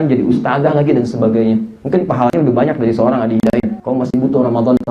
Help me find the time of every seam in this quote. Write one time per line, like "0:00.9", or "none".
0:03.8

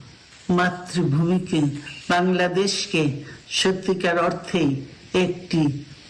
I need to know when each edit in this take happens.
none

